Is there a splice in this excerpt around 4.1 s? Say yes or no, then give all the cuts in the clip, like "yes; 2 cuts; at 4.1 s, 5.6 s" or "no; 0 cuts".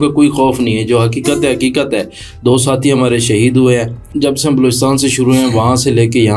yes; 1 cut; at 4.1 s